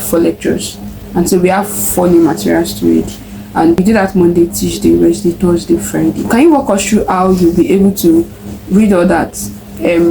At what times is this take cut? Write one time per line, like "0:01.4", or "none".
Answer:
0:06.2